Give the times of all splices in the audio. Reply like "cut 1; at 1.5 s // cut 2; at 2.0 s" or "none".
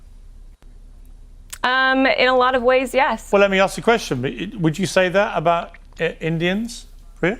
cut 1; at 3.3 s